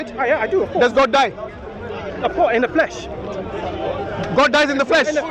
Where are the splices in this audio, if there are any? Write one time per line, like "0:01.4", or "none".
none